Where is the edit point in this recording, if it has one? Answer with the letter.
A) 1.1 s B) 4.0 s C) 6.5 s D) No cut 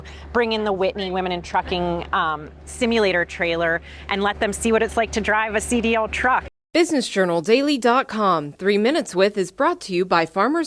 C